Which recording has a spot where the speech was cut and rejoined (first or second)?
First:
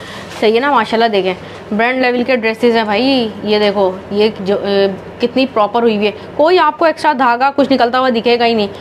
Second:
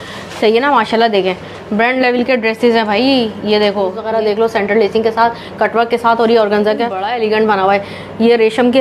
second